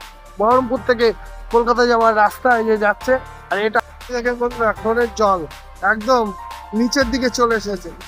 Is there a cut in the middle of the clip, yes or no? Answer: yes